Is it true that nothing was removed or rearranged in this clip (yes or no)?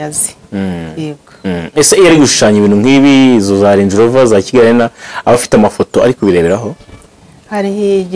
yes